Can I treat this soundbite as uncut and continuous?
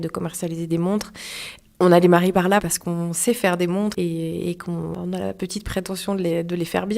no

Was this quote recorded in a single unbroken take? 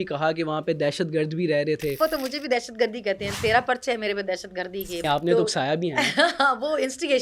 no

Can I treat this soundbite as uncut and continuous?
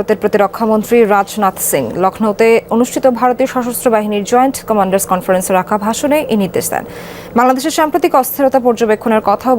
yes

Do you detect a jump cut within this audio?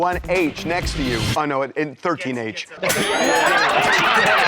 no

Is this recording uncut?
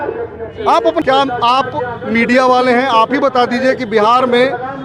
no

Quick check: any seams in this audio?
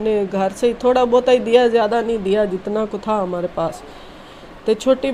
no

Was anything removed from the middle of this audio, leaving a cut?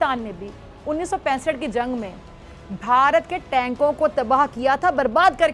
no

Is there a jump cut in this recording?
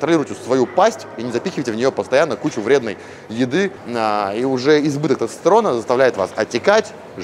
yes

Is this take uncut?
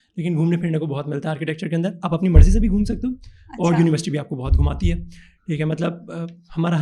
yes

